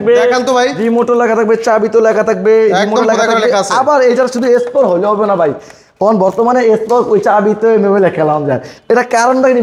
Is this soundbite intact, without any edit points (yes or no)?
yes